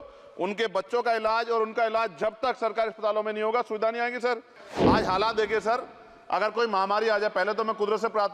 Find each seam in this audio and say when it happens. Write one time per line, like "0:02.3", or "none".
0:04.7